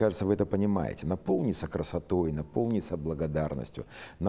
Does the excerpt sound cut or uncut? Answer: uncut